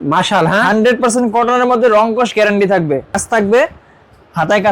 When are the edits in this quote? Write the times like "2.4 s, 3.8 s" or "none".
3.1 s